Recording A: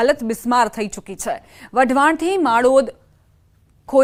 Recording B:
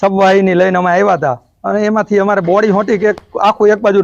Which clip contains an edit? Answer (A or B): B